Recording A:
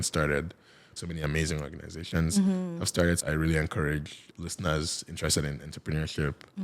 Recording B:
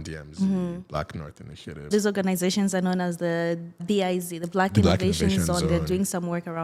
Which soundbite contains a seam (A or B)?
A